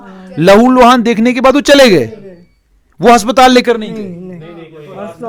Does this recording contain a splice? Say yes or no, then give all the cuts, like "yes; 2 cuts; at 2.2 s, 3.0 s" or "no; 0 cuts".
no; 0 cuts